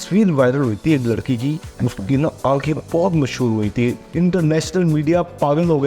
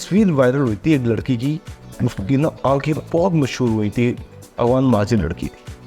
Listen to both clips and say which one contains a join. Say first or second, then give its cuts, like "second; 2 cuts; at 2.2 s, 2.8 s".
first; 2 cuts; at 1.7 s, 4.1 s